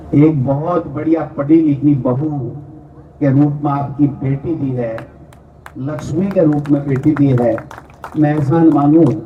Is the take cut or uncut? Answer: uncut